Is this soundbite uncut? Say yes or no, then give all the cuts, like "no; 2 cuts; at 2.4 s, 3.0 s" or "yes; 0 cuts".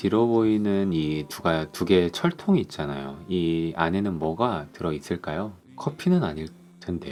yes; 0 cuts